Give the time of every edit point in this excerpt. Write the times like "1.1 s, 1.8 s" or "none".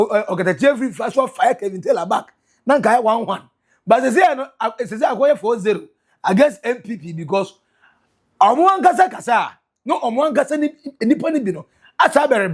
none